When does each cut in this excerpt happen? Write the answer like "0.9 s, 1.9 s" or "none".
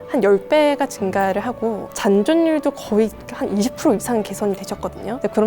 1.9 s